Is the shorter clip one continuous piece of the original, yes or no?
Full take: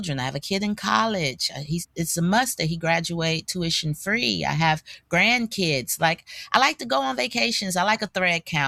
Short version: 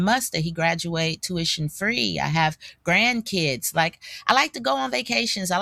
yes